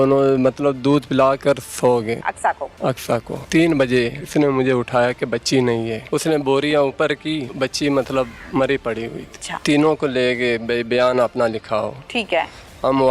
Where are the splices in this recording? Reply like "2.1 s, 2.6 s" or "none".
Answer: 2.2 s, 3.4 s, 4.2 s, 6.0 s, 7.5 s, 8.4 s, 9.5 s